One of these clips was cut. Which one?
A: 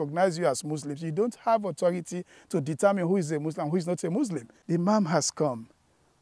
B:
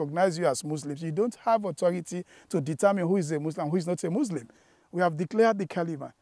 A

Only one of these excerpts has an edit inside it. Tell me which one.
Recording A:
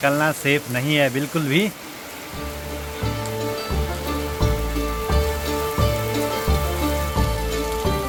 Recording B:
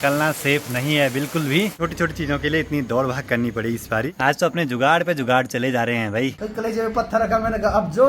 B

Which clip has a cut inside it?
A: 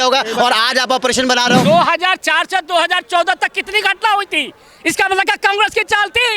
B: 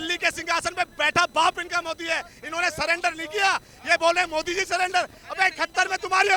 A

